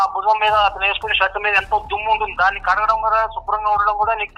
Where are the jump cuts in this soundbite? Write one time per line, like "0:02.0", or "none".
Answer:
none

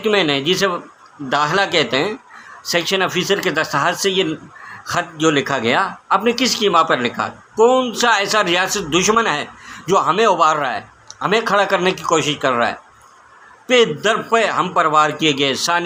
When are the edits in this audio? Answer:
none

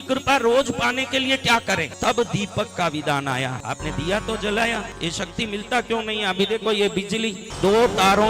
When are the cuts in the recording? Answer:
0:01.9
0:03.6
0:04.9
0:07.5

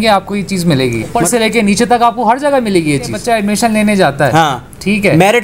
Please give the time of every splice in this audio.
0:01.2
0:03.2

